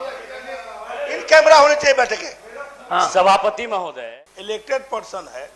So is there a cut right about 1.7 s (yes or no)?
no